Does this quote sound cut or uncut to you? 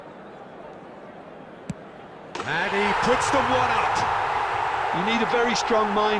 uncut